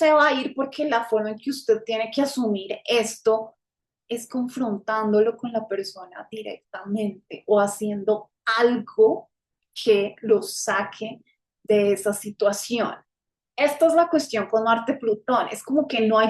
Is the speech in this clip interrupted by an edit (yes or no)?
no